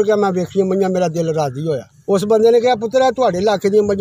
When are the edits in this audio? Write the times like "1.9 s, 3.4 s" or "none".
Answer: 1.9 s